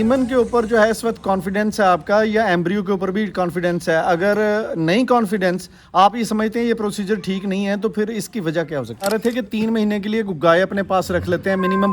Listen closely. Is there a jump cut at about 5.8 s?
no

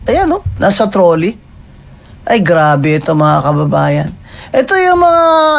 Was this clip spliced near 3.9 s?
no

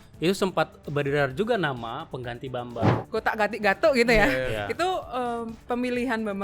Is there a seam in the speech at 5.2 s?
no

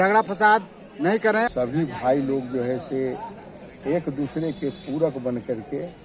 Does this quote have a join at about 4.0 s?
no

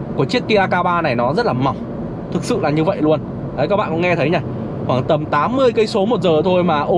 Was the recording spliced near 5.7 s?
no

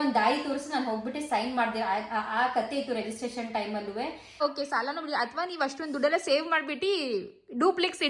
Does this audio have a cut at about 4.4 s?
yes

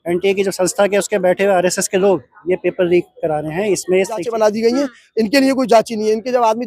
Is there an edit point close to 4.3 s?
yes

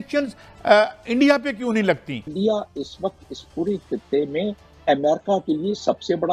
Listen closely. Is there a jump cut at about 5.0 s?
no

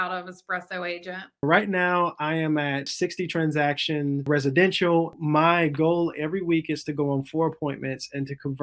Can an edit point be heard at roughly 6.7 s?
no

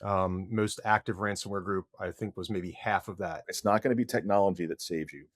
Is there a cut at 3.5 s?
yes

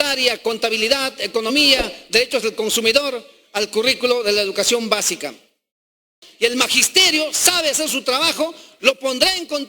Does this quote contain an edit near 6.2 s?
yes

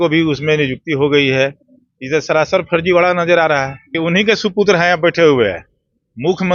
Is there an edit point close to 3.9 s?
yes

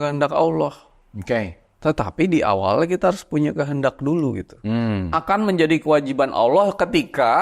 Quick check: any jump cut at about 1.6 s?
no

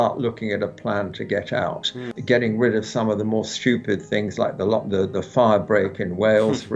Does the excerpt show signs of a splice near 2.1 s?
yes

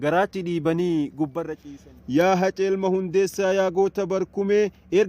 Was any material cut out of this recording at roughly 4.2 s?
no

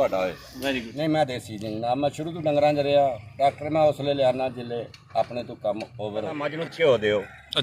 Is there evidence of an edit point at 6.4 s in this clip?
yes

